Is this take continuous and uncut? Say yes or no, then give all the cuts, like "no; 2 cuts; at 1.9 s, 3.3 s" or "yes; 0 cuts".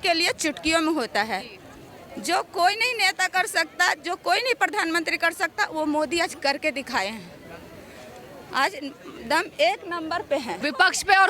yes; 0 cuts